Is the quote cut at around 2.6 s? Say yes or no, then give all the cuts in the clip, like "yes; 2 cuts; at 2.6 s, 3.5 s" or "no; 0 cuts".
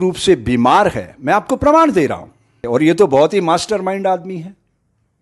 yes; 1 cut; at 2.6 s